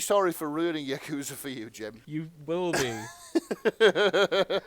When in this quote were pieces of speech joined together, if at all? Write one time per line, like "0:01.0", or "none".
0:02.0